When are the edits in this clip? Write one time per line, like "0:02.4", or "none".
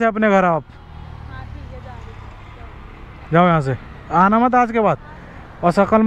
none